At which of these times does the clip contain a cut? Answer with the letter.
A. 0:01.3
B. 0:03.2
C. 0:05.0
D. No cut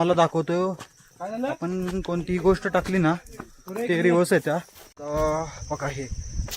C